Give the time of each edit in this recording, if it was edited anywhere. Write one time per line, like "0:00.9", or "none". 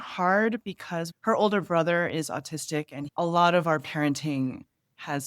0:01.0